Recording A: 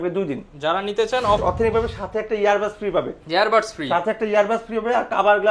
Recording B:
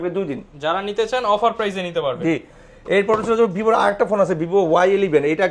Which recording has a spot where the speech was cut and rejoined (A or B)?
A